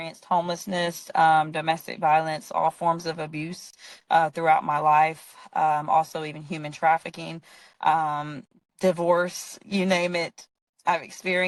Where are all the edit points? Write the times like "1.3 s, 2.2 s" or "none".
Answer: none